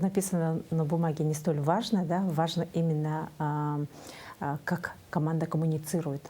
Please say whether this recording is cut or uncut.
uncut